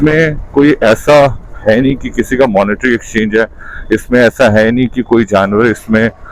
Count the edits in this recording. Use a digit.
0